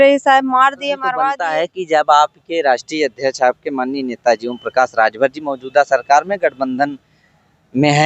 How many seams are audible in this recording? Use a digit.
1